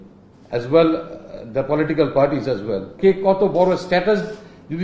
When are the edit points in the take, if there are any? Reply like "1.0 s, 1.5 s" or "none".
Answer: 2.9 s

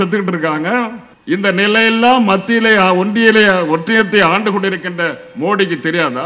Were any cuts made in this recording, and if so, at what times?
1.1 s

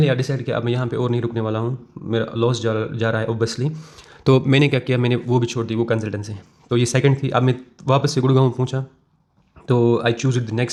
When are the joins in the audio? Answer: none

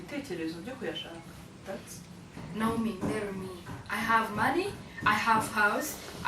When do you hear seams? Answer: 2.4 s

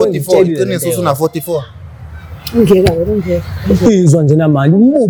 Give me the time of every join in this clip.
none

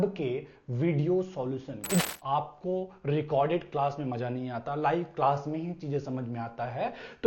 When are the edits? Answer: 2.0 s

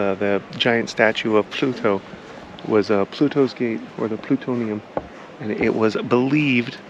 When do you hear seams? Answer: none

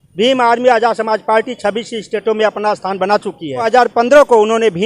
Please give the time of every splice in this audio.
3.7 s

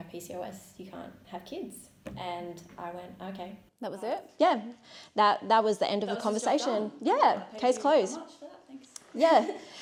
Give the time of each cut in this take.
none

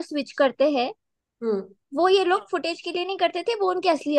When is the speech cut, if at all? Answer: none

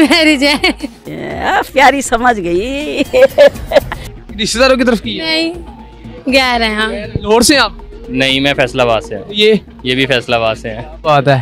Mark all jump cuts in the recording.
none

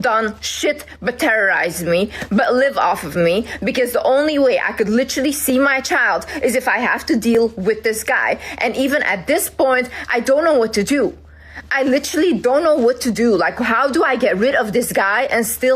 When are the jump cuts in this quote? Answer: none

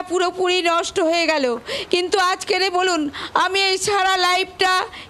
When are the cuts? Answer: none

